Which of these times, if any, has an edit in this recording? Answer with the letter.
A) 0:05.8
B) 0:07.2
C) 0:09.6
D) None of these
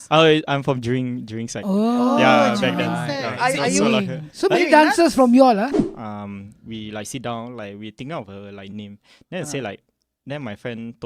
A